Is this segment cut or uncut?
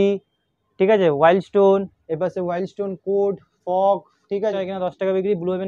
cut